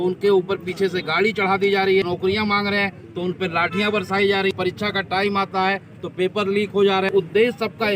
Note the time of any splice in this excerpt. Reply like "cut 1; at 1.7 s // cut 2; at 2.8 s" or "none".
cut 1; at 2.1 s // cut 2; at 4.5 s // cut 3; at 7.1 s

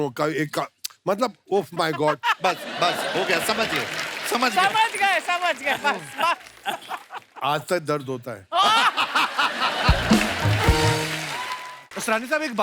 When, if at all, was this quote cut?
cut 1; at 11.7 s

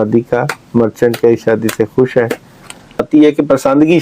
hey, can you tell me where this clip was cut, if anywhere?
cut 1; at 3.1 s

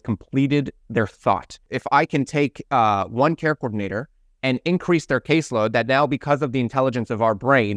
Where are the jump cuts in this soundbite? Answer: cut 1; at 1.7 s

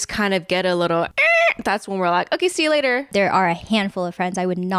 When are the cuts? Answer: cut 1; at 1.1 s // cut 2; at 3.1 s

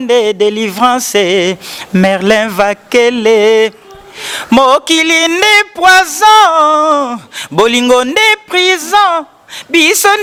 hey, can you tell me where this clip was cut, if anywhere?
none

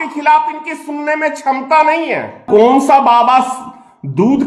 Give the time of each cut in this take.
cut 1; at 2.4 s

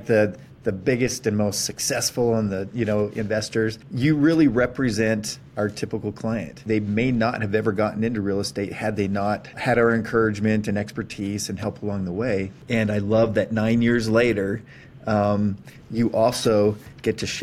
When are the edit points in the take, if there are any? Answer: cut 1; at 3.8 s // cut 2; at 6.6 s // cut 3; at 9.5 s // cut 4; at 12.6 s

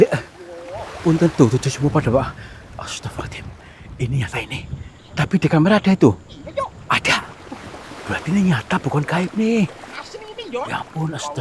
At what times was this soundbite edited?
none

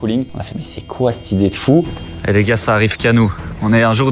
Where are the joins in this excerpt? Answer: cut 1; at 2.0 s

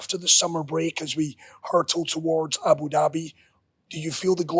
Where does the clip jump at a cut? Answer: none

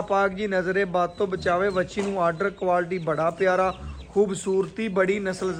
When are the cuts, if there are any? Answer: none

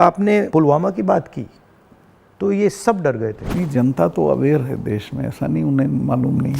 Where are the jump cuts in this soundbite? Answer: cut 1; at 3.4 s

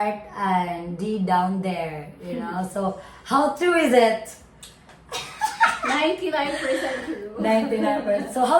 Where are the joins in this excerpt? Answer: none

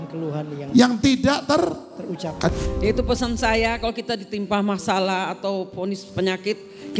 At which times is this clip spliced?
cut 1; at 2.5 s

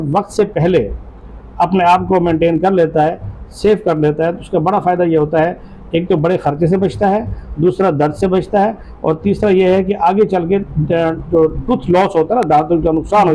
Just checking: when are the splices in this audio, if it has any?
none

